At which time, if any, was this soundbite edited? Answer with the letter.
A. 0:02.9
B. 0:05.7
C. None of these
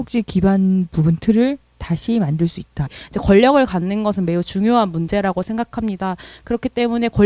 A